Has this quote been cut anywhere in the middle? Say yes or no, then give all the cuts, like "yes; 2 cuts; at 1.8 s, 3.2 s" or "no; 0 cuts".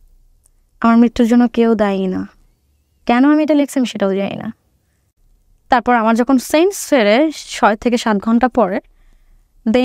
no; 0 cuts